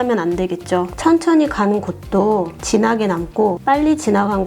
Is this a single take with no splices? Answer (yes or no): no